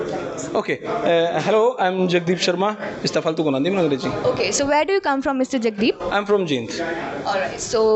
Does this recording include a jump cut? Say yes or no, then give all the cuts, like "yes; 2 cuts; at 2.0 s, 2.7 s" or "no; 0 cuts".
no; 0 cuts